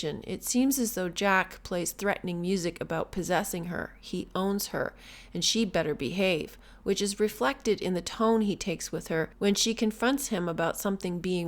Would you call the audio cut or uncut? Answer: cut